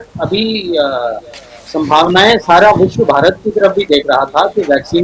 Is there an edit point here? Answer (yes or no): no